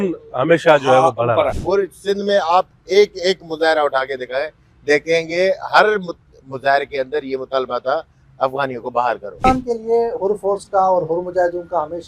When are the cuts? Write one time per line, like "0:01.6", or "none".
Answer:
0:01.6
0:09.5